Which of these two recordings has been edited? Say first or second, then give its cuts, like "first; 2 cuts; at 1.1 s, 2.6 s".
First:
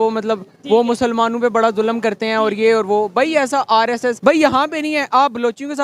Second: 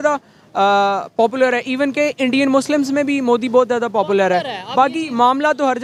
first; 1 cut; at 4.2 s